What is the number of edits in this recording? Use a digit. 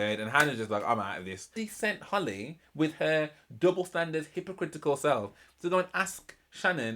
1